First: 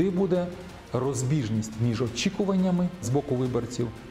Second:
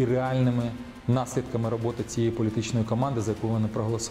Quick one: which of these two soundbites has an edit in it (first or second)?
first